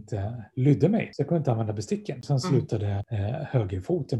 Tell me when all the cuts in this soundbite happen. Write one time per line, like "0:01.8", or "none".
0:01.1
0:02.2
0:03.1